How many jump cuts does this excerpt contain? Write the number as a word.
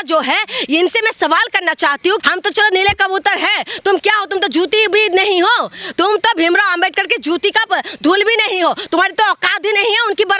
one